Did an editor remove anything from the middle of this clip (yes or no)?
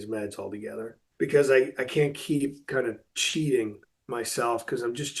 yes